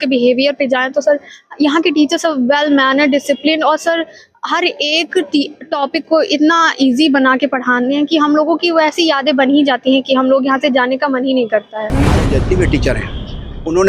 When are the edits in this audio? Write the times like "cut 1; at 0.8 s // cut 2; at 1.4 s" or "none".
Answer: cut 1; at 12.3 s